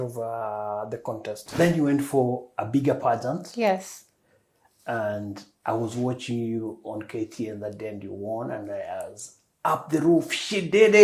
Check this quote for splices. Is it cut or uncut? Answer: cut